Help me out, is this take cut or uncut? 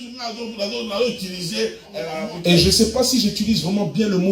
cut